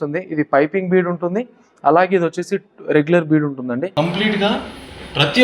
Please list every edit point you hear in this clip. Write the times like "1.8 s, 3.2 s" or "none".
3.9 s